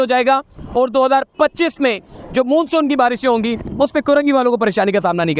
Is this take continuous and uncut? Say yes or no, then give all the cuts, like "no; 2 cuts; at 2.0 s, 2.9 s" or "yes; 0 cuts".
yes; 0 cuts